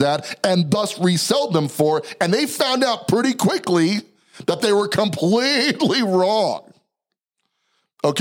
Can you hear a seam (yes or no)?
no